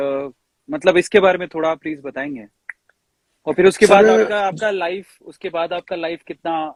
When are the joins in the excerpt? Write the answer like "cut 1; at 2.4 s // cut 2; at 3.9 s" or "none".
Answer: none